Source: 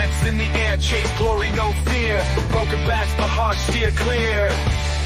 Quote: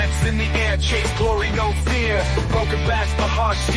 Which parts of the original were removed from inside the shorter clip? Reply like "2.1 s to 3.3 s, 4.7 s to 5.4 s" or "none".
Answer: none